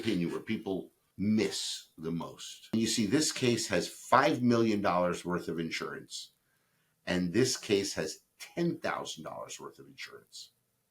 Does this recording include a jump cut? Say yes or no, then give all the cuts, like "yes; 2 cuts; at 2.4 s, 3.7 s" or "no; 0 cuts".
yes; 2 cuts; at 1.0 s, 2.7 s